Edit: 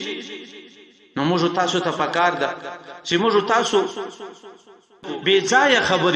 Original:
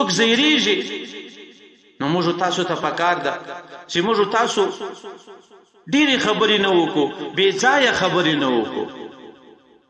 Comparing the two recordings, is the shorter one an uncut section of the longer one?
no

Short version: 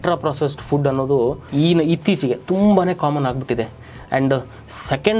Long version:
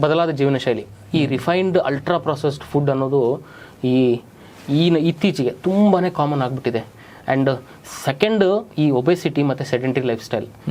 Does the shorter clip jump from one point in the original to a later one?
yes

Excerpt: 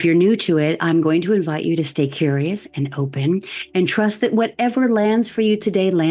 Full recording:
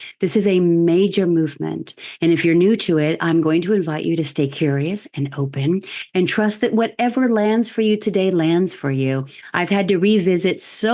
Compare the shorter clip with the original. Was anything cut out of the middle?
no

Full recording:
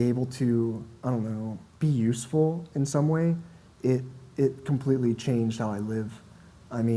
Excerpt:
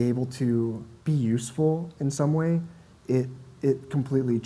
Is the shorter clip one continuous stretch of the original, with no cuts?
no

